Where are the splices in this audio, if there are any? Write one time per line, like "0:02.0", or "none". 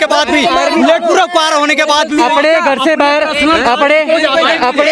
none